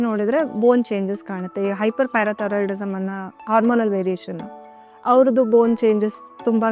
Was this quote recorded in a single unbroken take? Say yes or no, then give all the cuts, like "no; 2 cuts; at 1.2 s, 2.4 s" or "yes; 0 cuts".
yes; 0 cuts